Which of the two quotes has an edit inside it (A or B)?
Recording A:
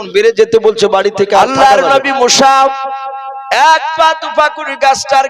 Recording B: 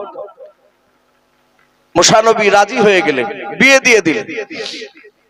A